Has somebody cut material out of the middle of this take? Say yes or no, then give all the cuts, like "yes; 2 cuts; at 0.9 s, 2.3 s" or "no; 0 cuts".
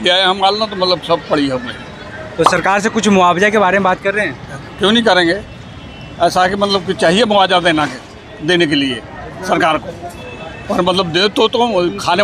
no; 0 cuts